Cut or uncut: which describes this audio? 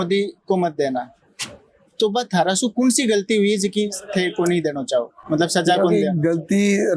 uncut